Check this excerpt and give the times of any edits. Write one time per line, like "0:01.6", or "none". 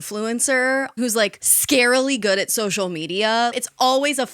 0:00.9
0:03.5